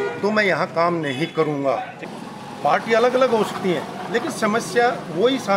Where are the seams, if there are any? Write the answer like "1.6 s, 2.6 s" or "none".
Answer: 2.1 s